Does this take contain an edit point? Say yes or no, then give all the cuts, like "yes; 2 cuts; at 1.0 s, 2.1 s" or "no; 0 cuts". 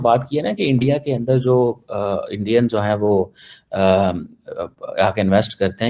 no; 0 cuts